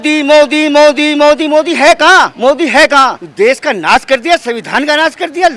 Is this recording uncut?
no; 2 cuts; at 2.3 s, 3.2 s

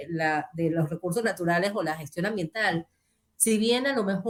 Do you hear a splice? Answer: no; 0 cuts

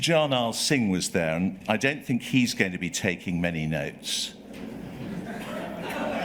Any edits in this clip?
no; 0 cuts

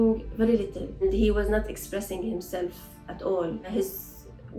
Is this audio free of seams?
no; 2 cuts; at 1.0 s, 3.7 s

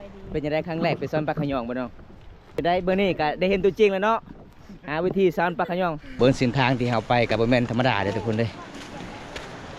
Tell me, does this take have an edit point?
yes; 2 cuts; at 2.6 s, 6.0 s

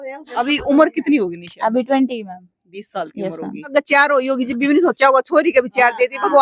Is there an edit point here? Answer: yes; 1 cut; at 3.7 s

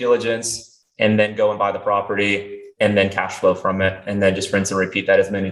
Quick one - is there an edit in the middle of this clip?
no; 0 cuts

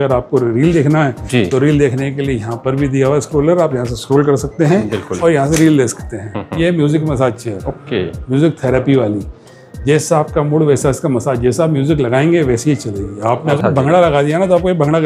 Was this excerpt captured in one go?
no; 2 cuts; at 6.4 s, 13.6 s

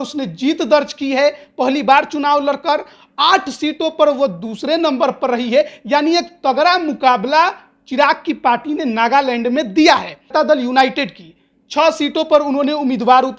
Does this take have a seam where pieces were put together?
yes; 1 cut; at 10.3 s

